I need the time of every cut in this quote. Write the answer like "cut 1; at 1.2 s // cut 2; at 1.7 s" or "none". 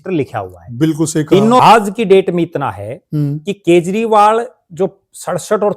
cut 1; at 1.6 s